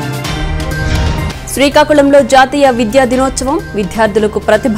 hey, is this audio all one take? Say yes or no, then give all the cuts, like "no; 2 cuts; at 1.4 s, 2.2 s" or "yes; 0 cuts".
yes; 0 cuts